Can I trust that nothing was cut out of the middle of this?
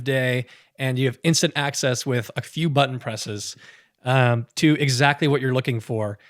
yes; 0 cuts

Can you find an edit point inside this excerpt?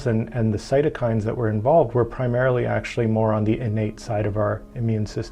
no; 0 cuts

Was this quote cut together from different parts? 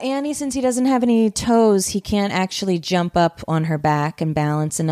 no; 0 cuts

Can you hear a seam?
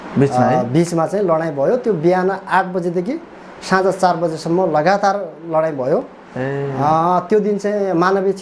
no; 0 cuts

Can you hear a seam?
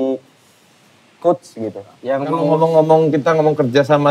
yes; 1 cut; at 2.0 s

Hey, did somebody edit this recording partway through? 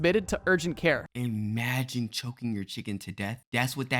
yes; 1 cut; at 1.0 s

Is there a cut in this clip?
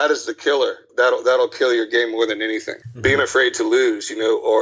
no; 0 cuts

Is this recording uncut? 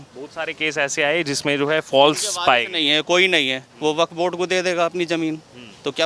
yes; 0 cuts

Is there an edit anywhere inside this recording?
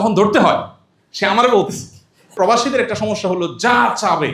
yes; 1 cut; at 2.3 s

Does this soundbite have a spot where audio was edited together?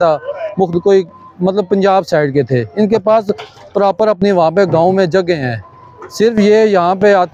no; 0 cuts

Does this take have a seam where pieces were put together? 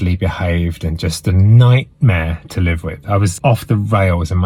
yes; 1 cut; at 3.3 s

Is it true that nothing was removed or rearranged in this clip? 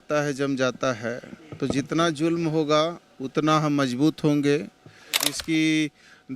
no; 1 cut; at 5.3 s

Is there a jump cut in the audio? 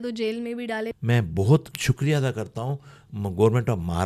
yes; 2 cuts; at 1.0 s, 1.7 s

